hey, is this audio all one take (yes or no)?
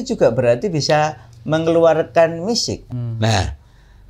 no